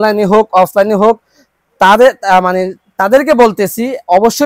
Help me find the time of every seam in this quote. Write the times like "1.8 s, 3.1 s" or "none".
none